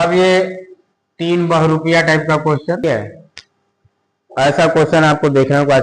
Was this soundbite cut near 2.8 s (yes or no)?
yes